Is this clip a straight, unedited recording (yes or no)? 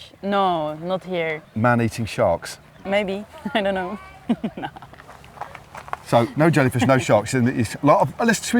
no